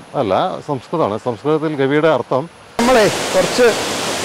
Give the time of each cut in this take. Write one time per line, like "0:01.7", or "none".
0:02.8